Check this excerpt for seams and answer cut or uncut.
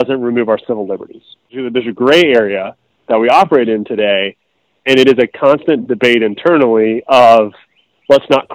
uncut